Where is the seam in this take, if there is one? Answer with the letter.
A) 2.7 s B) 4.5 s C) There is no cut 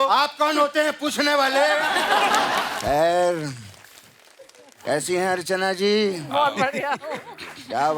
A